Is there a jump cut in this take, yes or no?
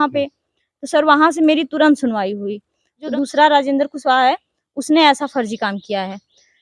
yes